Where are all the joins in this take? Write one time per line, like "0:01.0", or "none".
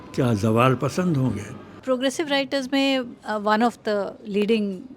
0:01.8